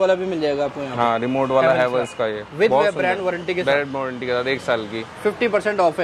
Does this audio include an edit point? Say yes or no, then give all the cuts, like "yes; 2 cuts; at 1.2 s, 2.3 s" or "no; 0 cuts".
no; 0 cuts